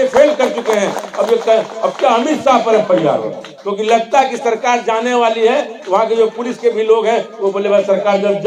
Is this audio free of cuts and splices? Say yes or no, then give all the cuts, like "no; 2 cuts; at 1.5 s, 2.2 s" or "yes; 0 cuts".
yes; 0 cuts